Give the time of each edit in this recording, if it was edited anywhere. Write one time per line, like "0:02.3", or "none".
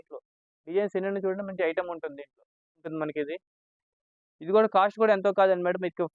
0:02.9